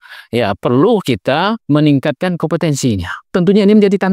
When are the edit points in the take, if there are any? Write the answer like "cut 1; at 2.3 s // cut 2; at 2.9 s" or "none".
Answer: cut 1; at 1.6 s // cut 2; at 3.2 s